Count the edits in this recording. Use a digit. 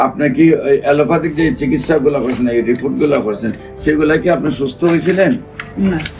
0